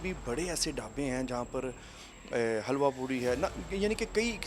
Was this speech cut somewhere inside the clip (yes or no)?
no